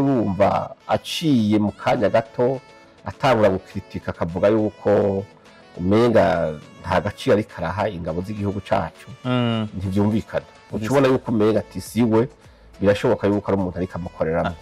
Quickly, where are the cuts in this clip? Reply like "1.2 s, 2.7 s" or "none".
none